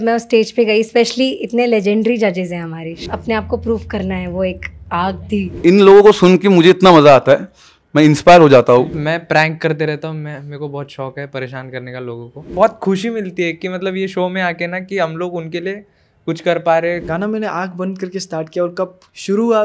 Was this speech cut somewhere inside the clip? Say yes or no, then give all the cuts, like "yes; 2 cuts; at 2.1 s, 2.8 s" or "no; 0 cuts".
yes; 5 cuts; at 2.9 s, 5.6 s, 9.0 s, 12.5 s, 17.0 s